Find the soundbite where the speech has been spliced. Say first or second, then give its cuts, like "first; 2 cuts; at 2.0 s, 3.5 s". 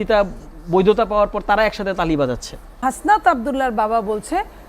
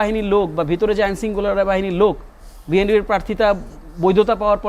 first; 1 cut; at 2.8 s